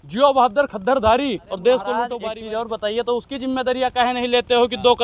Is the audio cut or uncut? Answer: cut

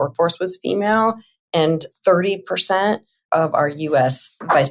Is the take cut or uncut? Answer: uncut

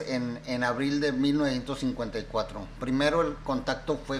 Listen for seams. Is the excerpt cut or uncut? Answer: cut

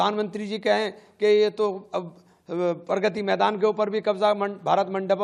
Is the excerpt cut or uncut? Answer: uncut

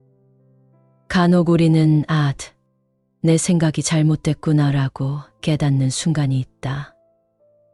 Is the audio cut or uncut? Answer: uncut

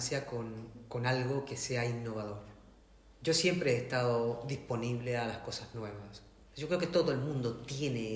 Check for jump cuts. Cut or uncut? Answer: uncut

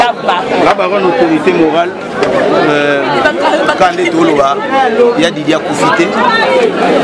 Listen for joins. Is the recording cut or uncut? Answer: uncut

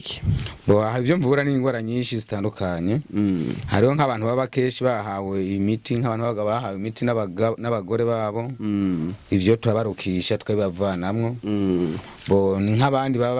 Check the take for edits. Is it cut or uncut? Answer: uncut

